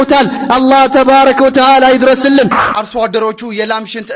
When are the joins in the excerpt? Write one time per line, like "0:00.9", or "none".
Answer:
0:02.6